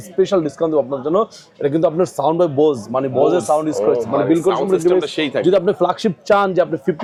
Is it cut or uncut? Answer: uncut